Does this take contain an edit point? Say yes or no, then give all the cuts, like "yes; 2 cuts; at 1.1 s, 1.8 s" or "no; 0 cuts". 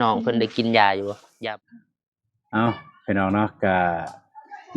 yes; 1 cut; at 1.3 s